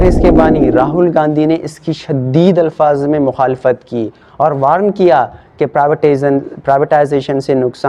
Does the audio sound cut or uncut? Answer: uncut